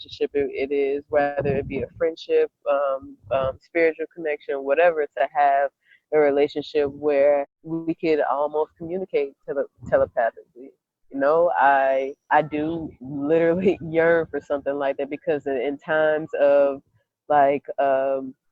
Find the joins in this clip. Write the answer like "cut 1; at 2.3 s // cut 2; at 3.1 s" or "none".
cut 1; at 7.6 s // cut 2; at 12.3 s